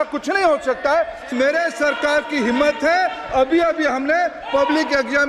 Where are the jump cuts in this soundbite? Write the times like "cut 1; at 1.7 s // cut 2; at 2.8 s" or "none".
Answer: cut 1; at 1.3 s